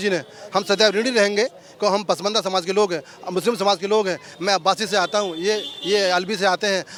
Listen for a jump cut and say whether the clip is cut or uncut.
uncut